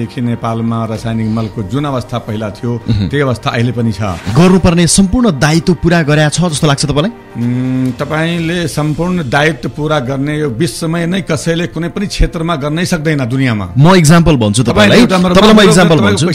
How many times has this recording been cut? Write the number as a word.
one